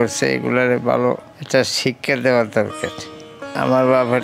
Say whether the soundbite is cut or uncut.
cut